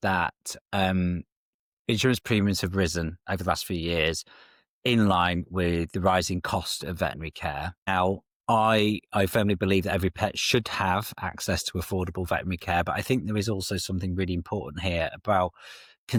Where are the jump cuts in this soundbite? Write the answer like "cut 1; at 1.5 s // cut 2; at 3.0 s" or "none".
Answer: none